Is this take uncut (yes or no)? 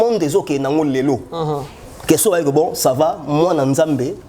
yes